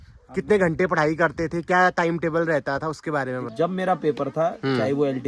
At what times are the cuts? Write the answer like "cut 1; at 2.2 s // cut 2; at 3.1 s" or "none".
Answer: cut 1; at 3.5 s